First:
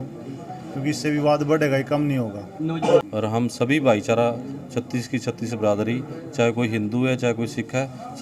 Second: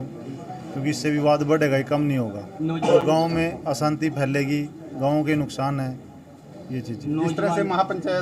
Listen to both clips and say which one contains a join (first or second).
first